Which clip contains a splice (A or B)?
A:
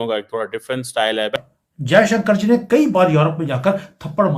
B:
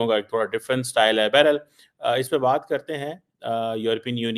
A